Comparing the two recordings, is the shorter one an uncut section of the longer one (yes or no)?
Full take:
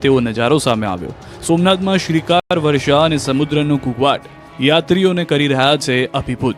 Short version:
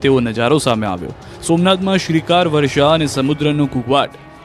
no